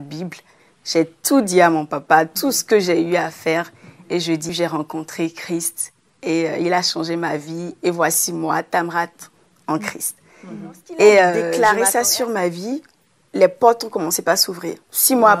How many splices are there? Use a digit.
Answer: 2